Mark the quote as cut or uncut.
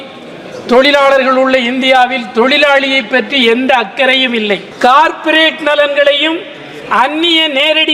cut